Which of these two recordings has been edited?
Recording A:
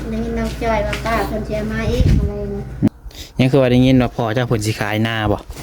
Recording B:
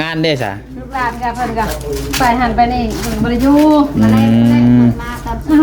A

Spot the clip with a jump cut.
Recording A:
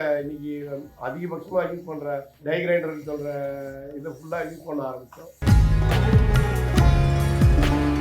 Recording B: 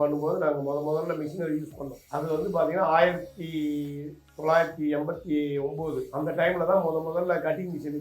A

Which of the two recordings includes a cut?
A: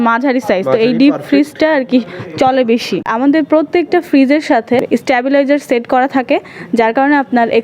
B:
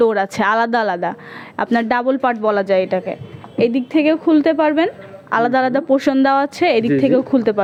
A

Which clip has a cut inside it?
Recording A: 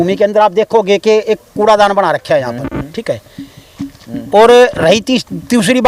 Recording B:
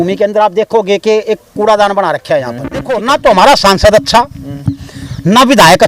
B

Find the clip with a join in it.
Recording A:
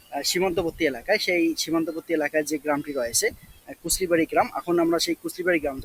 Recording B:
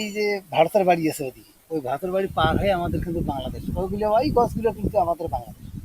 B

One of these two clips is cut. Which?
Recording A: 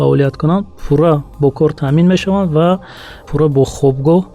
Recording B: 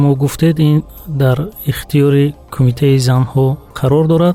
A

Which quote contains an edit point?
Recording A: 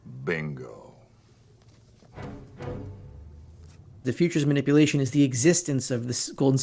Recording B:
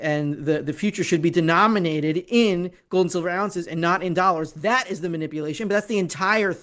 A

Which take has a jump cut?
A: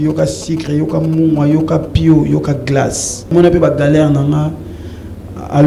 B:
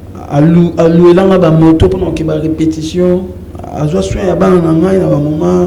A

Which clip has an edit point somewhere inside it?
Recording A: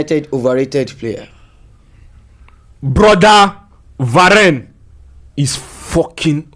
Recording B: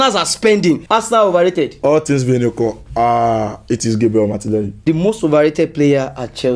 B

